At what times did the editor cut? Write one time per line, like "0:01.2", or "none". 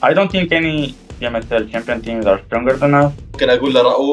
0:01.0
0:03.4